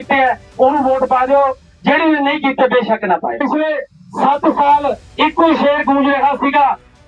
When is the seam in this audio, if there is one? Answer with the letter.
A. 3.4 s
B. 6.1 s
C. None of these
A